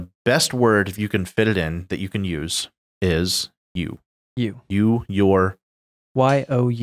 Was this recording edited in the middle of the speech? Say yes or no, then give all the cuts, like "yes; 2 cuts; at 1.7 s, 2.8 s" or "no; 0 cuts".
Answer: no; 0 cuts